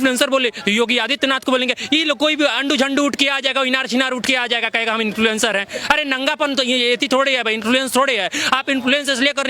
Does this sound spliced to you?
no; 0 cuts

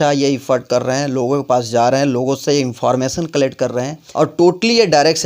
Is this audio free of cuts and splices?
no; 1 cut; at 4.0 s

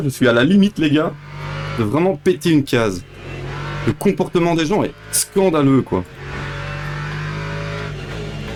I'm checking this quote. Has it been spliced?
no; 0 cuts

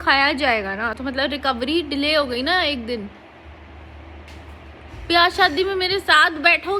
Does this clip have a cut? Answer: no; 0 cuts

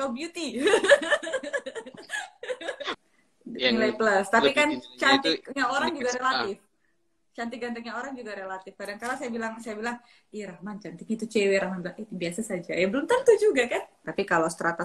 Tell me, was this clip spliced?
yes; 2 cuts; at 3.0 s, 14.0 s

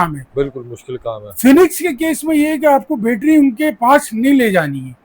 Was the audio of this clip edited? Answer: no; 0 cuts

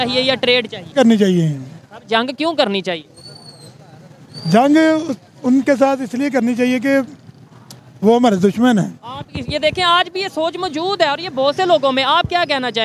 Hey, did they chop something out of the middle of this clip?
yes; 1 cut; at 0.9 s

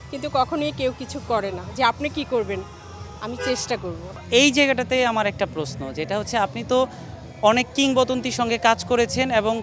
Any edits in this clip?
no; 0 cuts

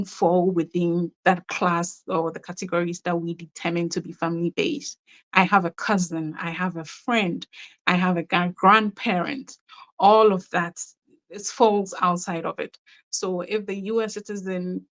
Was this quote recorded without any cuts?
yes; 0 cuts

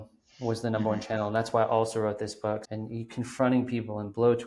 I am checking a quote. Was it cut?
yes; 1 cut; at 2.7 s

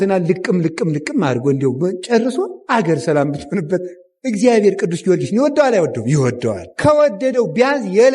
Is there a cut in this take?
yes; 1 cut; at 4.1 s

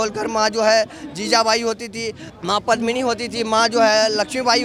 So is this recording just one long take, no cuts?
yes; 0 cuts

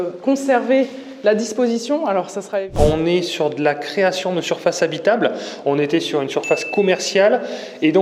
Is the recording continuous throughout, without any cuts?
no; 1 cut; at 2.7 s

